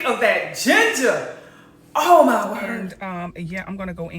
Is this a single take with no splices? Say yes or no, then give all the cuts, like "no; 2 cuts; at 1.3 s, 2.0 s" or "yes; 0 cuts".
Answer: no; 1 cut; at 2.9 s